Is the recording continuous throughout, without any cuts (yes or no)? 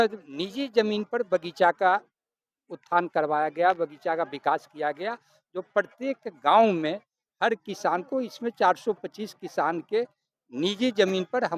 yes